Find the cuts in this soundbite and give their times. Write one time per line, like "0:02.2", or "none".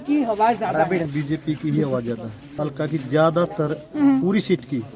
0:01.1
0:02.4